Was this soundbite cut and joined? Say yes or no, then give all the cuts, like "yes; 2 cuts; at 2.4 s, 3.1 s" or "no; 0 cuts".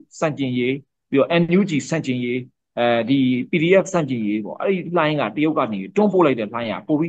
no; 0 cuts